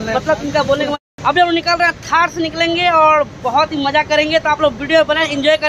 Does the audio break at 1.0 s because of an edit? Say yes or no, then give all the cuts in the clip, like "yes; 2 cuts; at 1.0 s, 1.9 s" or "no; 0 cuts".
yes; 1 cut; at 1.0 s